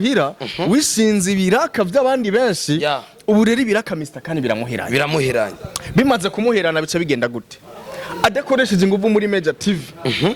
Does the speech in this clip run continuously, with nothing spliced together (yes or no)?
yes